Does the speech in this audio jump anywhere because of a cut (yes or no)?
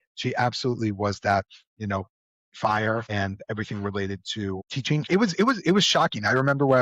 yes